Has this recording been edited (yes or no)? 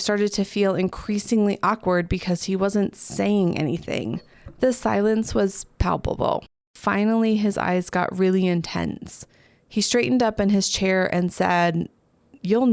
yes